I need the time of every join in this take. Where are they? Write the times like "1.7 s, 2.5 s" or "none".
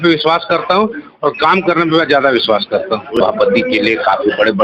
3.2 s